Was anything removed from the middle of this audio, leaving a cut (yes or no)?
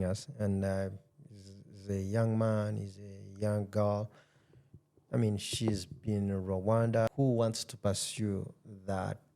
yes